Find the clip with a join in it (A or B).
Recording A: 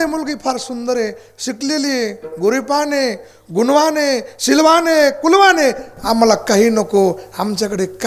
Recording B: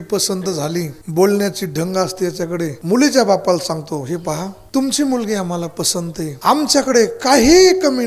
B